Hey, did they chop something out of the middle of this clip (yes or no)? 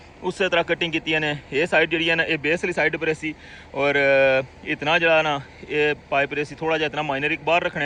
no